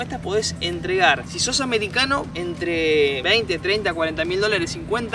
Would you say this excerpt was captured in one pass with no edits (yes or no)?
yes